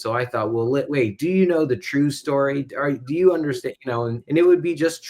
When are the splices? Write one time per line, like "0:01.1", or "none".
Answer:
0:04.1